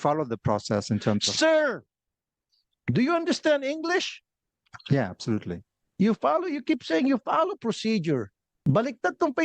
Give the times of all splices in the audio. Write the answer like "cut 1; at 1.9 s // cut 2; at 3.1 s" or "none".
cut 1; at 8.5 s